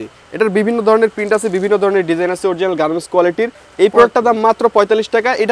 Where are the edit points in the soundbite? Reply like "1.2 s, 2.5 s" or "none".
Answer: 3.6 s